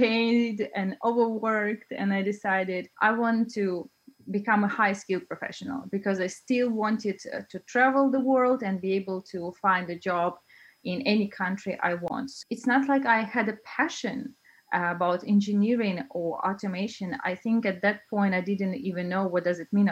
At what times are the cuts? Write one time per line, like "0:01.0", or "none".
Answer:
0:12.3

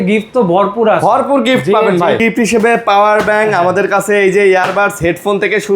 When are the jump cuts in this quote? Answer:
0:02.2

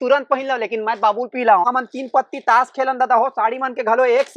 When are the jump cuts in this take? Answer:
0:01.7

